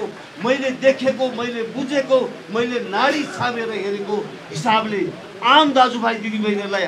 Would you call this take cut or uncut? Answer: uncut